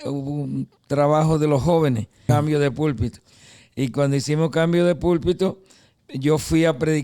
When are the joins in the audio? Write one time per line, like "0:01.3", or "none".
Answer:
0:02.2